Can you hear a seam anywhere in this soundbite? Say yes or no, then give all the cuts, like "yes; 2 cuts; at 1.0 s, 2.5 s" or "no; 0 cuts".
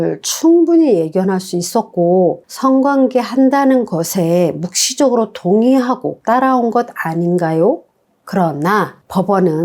yes; 1 cut; at 8.0 s